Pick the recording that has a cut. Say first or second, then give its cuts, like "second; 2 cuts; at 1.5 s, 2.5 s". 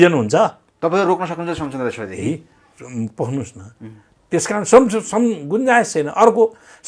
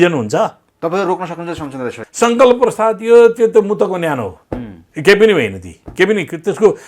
second; 1 cut; at 2.0 s